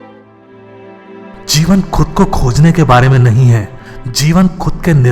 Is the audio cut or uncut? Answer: uncut